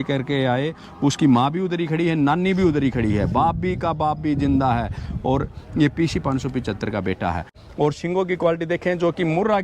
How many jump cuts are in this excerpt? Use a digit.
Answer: 1